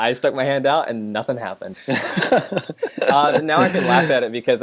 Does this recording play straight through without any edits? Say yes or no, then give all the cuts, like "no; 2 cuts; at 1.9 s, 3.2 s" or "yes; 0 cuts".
no; 1 cut; at 1.7 s